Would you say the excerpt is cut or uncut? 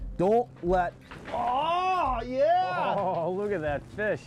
uncut